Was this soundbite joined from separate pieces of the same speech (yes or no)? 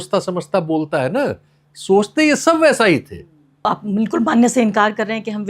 yes